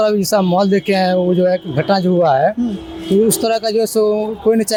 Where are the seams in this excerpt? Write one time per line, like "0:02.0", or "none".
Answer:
none